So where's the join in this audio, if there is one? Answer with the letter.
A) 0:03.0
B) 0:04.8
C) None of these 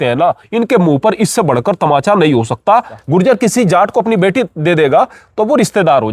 A